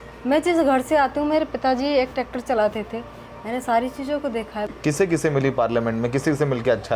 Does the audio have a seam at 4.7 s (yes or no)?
yes